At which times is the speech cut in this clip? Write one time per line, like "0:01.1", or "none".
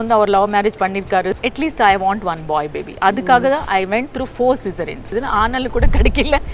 0:01.4
0:05.1